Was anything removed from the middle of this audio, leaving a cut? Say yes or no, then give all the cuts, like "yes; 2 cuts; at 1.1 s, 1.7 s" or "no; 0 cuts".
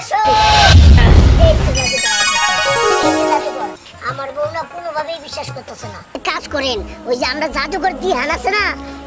yes; 1 cut; at 6.2 s